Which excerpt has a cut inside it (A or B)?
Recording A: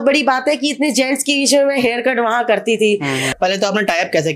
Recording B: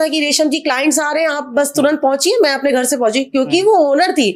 A